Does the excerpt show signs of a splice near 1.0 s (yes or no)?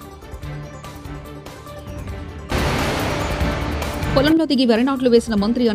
yes